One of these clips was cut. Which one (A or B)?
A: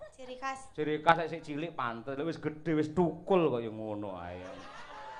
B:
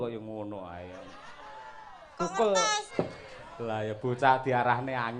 B